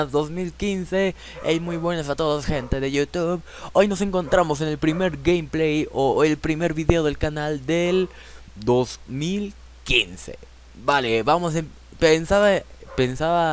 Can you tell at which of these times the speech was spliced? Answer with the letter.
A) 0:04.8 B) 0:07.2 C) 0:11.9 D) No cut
A